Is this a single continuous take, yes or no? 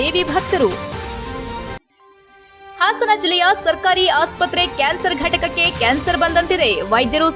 yes